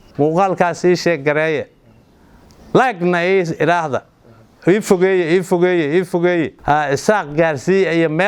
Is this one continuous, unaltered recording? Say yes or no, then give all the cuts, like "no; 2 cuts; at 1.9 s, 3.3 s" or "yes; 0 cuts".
yes; 0 cuts